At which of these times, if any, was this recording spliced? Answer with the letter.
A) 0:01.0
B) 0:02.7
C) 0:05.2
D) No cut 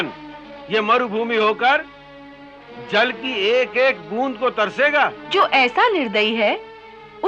C